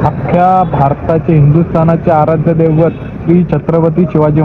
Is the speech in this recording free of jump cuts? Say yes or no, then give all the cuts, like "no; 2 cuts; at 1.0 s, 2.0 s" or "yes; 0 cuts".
yes; 0 cuts